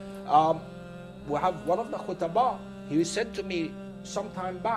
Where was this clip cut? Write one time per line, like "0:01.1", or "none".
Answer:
none